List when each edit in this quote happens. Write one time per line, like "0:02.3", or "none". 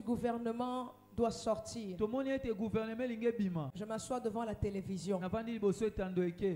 0:03.8